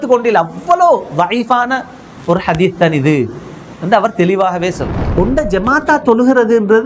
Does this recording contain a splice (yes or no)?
yes